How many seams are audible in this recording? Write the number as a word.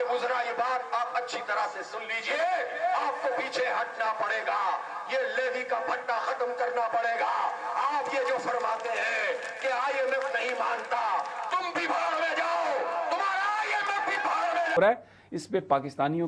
one